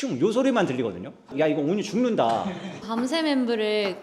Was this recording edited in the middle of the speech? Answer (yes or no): yes